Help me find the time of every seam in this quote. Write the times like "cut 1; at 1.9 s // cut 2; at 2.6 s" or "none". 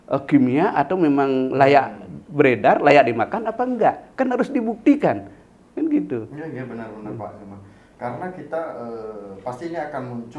none

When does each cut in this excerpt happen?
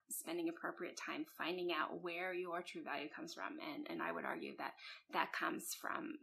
none

